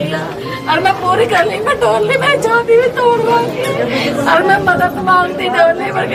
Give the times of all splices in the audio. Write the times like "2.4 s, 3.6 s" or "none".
none